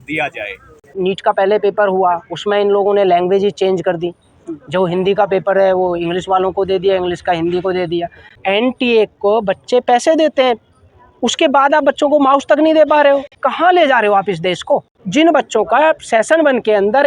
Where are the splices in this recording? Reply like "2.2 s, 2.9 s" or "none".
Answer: 0.9 s, 8.4 s, 13.4 s, 15.0 s